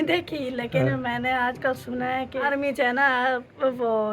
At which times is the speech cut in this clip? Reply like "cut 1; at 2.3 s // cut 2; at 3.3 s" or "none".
cut 1; at 2.4 s